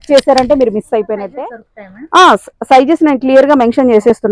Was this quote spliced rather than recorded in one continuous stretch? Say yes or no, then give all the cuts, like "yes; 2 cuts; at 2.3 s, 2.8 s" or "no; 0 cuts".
yes; 1 cut; at 1.3 s